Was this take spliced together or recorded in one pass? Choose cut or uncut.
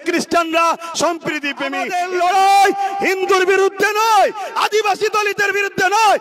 cut